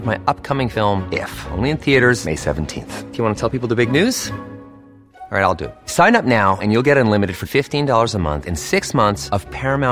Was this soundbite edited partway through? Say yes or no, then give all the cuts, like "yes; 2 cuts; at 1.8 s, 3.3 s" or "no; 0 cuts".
no; 0 cuts